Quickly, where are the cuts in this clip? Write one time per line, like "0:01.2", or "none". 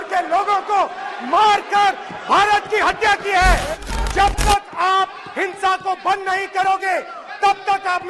0:03.7